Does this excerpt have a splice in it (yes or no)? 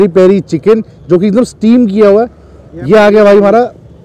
no